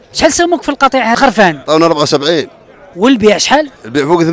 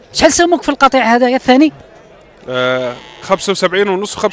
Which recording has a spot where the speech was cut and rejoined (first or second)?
first